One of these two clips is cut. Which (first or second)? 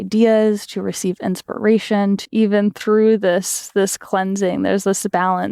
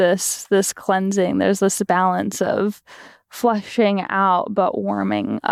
first